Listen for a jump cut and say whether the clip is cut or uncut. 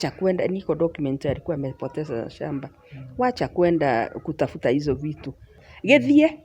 cut